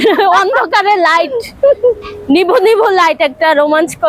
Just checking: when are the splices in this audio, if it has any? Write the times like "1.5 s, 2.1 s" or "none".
none